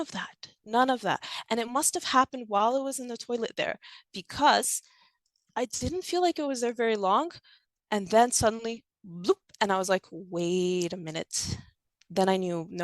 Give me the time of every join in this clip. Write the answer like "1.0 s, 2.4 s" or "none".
5.3 s

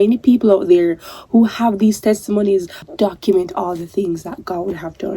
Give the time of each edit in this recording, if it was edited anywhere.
2.8 s

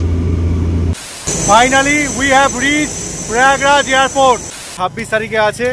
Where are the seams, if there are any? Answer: 1.1 s, 4.6 s

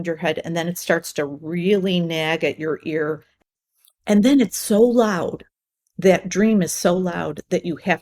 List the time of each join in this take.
3.5 s

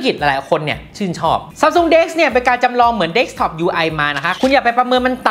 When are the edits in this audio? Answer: 1.5 s

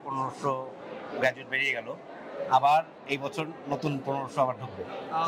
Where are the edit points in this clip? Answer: none

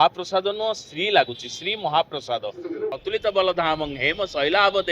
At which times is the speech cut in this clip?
2.9 s

